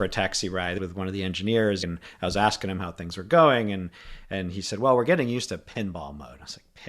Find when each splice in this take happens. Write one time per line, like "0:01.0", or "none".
0:01.8